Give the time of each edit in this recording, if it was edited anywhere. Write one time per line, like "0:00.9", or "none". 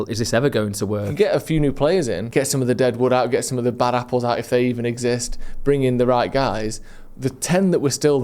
0:01.1
0:02.2